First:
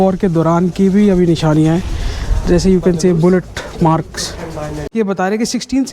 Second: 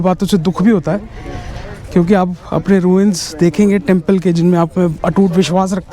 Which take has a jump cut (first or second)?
first